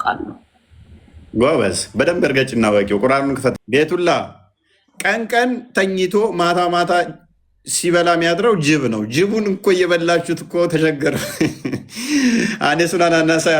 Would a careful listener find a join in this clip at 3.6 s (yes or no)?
yes